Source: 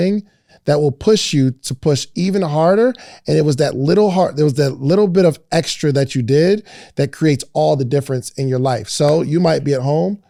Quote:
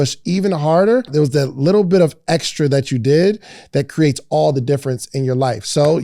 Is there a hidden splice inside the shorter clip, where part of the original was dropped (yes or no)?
yes